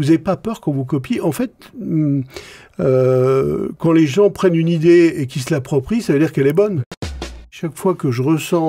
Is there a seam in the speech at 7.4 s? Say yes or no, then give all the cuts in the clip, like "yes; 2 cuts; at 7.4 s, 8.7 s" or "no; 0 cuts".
yes; 1 cut; at 7.4 s